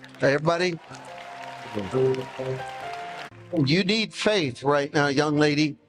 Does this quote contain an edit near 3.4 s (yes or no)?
yes